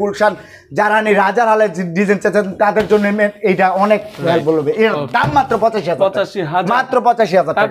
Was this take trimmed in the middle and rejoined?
no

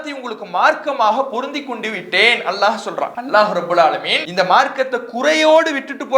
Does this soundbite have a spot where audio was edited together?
yes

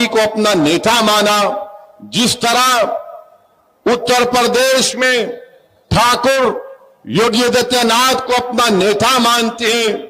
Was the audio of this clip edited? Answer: no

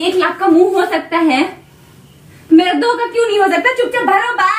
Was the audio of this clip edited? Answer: no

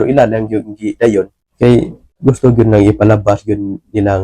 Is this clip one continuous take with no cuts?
no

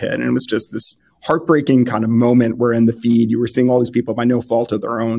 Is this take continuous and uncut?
yes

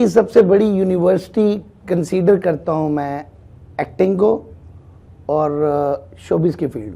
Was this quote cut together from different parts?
no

